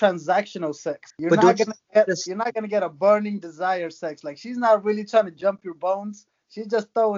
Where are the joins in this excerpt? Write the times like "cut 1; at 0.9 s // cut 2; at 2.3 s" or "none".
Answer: cut 1; at 1.1 s